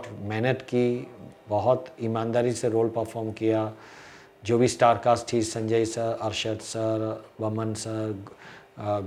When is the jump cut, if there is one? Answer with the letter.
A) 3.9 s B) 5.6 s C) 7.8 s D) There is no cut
D